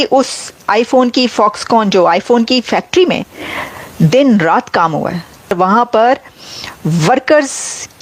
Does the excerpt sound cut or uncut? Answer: cut